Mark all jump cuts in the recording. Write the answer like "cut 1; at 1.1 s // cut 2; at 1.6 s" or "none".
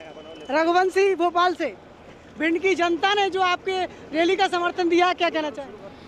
cut 1; at 2.2 s